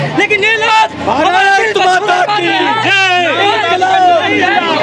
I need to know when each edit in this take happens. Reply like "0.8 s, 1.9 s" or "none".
none